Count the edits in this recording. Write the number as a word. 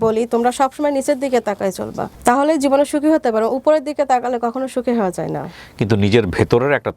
one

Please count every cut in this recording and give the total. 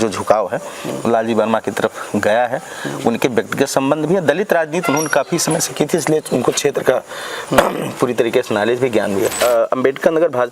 one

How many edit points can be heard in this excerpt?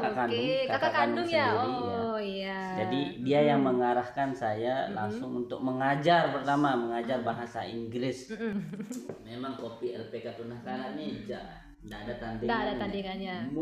one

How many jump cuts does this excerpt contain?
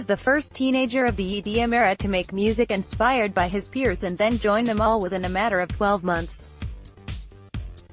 one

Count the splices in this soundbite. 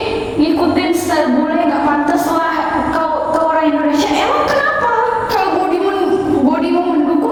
zero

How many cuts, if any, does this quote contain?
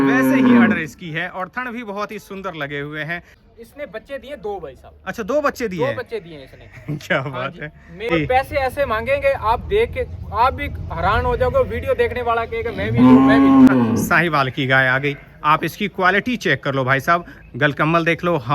three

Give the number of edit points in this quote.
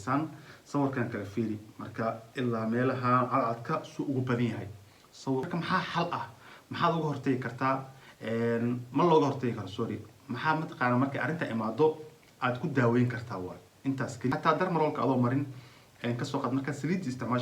two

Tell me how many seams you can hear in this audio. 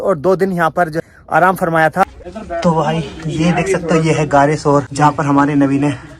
three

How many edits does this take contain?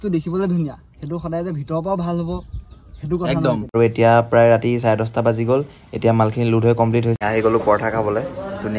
two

